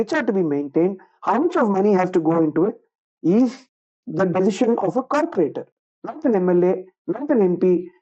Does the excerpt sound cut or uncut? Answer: uncut